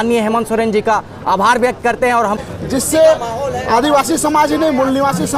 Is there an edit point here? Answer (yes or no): yes